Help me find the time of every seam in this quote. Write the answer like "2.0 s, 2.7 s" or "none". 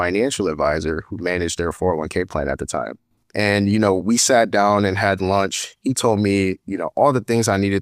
3.1 s